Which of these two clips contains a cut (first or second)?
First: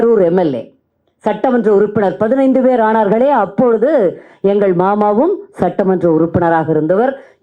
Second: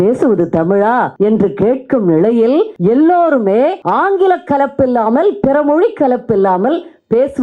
second